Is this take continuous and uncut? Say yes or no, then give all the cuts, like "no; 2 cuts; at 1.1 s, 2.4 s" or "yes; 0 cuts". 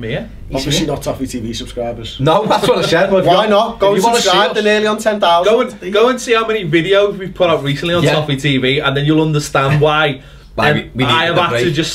no; 1 cut; at 9.8 s